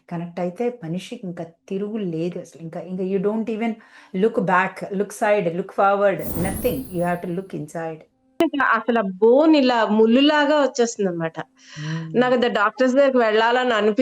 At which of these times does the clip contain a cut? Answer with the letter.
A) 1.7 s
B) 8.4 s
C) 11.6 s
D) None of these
B